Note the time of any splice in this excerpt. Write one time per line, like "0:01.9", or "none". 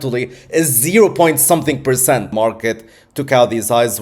0:02.3